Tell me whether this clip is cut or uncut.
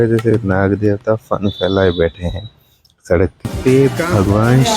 cut